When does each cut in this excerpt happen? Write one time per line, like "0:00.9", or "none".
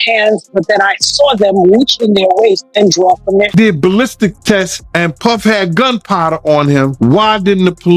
0:03.5
0:04.8
0:06.9

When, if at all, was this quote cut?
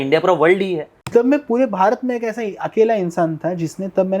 0:00.9

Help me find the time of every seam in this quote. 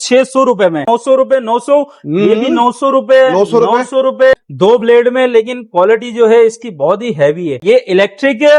0:00.8
0:04.3
0:07.6

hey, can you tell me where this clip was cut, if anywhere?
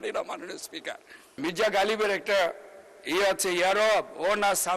0:01.4

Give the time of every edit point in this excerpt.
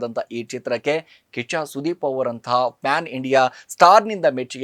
none

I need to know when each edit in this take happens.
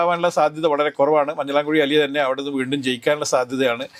none

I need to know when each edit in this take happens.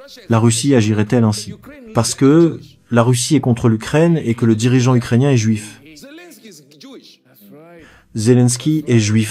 0:08.0

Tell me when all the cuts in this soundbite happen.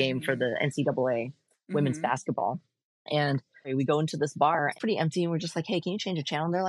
0:03.7
0:04.8

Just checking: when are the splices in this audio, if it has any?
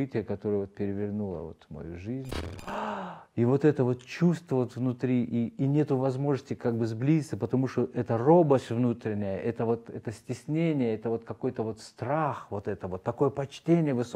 0:02.7

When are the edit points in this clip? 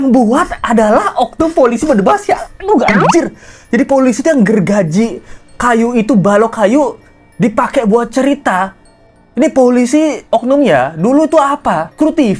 none

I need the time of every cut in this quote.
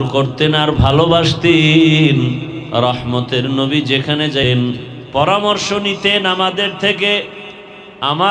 0:02.6
0:04.5

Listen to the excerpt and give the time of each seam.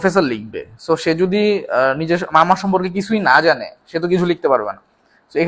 none

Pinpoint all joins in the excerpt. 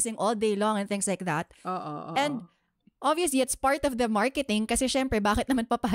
none

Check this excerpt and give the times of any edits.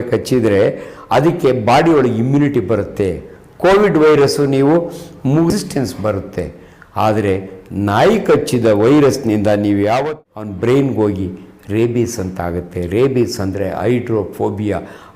0:05.5
0:10.1

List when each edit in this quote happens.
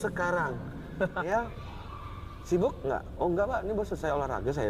0:01.2

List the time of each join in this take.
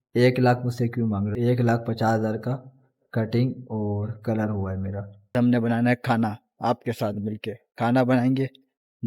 0:01.3
0:05.4

